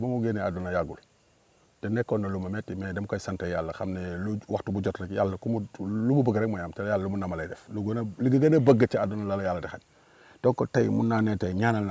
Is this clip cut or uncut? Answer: uncut